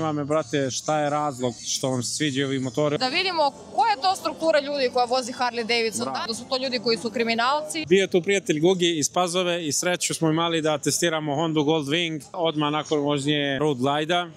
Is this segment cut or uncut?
cut